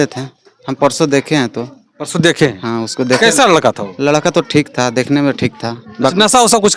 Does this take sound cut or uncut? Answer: uncut